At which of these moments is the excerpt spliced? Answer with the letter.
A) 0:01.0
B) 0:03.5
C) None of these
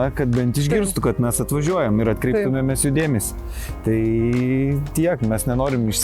C